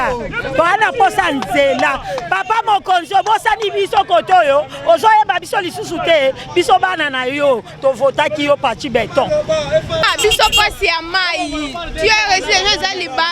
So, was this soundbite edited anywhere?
yes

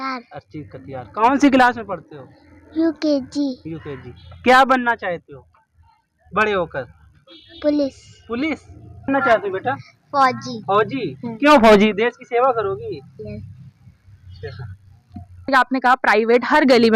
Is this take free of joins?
no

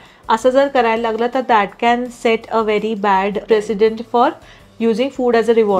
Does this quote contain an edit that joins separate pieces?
yes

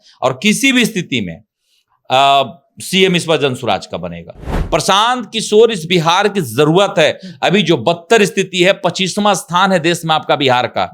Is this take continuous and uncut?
no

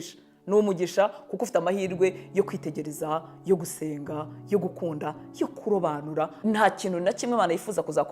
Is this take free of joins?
no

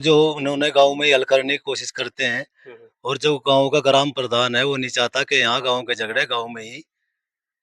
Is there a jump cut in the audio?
no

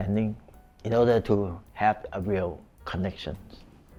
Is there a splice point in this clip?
no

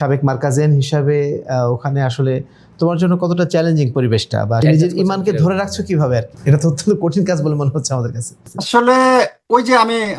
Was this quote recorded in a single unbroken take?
no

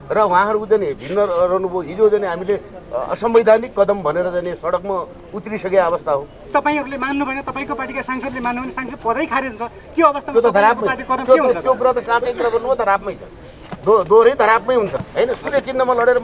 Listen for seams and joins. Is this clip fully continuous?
no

